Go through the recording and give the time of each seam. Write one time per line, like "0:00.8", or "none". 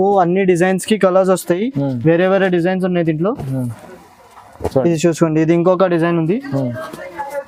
none